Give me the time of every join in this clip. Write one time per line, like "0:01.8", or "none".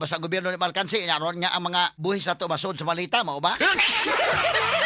0:02.0